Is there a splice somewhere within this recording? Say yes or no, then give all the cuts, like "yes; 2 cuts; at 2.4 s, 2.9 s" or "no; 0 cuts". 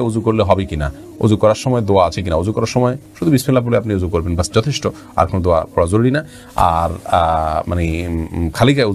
no; 0 cuts